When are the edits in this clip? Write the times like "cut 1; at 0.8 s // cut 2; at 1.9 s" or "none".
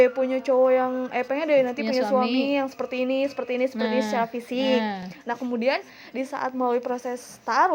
none